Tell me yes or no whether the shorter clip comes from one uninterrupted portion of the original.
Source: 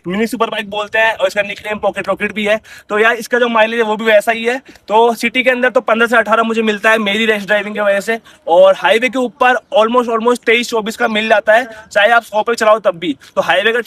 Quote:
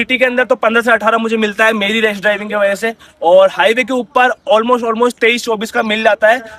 yes